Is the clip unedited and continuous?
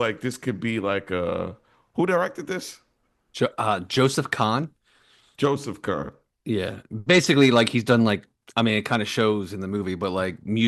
yes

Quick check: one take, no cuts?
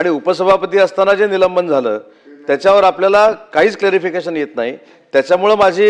yes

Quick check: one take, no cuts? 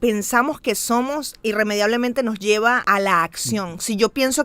no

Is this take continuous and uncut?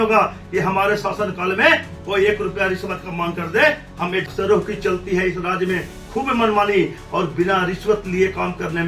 no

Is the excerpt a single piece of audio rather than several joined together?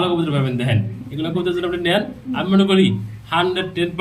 yes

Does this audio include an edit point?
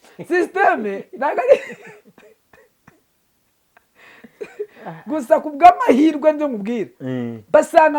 no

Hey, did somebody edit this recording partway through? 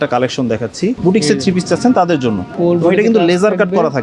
yes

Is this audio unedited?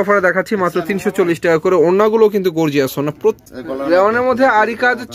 no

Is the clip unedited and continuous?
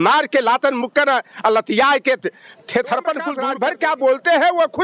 no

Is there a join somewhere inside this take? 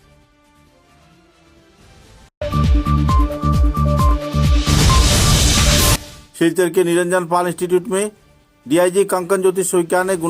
no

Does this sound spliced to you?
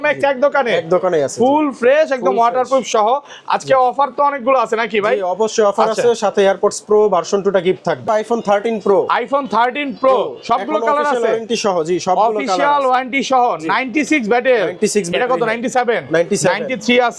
yes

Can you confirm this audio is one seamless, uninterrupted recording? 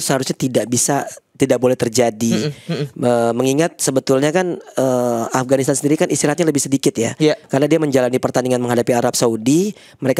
yes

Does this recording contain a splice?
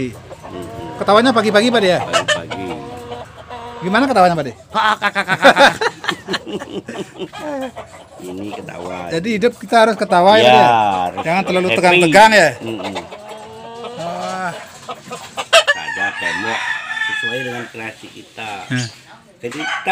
yes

